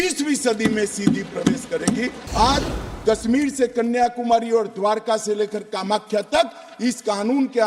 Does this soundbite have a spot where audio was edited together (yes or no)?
yes